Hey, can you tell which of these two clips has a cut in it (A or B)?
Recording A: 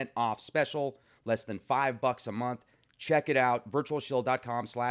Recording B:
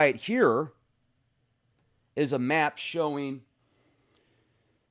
A